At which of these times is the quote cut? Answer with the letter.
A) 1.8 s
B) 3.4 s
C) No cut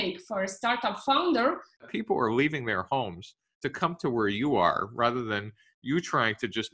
A